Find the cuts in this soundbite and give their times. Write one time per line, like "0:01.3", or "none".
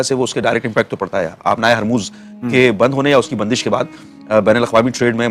none